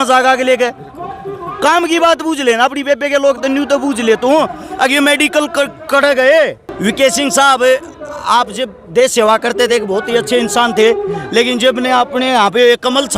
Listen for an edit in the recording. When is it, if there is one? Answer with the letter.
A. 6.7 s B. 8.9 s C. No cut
A